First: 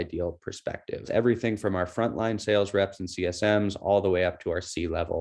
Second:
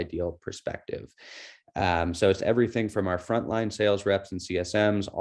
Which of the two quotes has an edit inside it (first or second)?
first